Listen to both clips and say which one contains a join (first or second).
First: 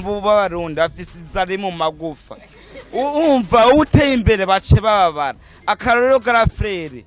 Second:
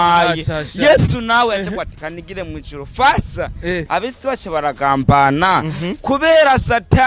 second